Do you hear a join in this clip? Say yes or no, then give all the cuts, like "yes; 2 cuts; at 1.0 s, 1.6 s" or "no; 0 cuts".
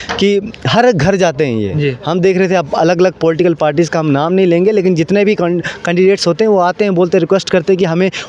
no; 0 cuts